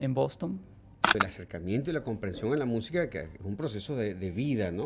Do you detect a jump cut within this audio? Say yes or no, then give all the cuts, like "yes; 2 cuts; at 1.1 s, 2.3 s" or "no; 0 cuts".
yes; 1 cut; at 1.2 s